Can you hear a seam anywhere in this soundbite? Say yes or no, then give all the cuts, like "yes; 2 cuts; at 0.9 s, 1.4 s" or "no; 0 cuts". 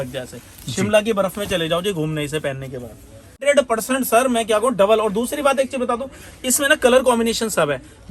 yes; 1 cut; at 3.4 s